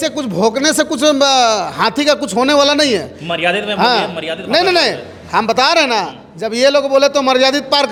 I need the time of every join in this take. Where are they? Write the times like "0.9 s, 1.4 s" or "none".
none